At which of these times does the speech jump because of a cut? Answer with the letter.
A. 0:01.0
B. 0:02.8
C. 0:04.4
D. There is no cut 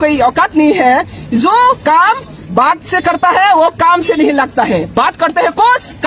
D